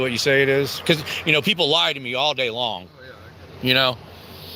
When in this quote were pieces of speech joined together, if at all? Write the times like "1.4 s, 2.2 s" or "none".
none